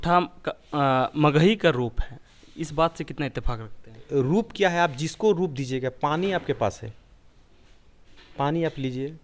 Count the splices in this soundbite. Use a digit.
1